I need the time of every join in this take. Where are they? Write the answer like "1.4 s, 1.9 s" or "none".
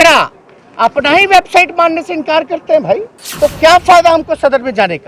3.2 s